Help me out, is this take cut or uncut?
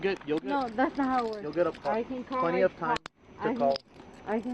uncut